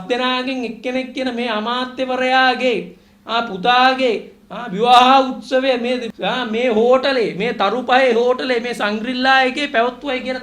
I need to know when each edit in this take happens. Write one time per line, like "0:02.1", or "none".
0:06.1